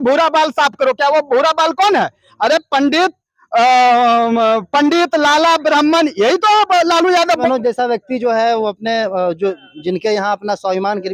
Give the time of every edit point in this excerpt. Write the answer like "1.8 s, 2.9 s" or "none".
7.4 s